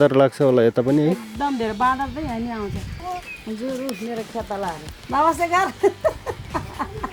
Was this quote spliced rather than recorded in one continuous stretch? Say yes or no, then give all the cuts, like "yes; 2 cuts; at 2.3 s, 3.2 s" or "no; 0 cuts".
yes; 2 cuts; at 2.9 s, 4.9 s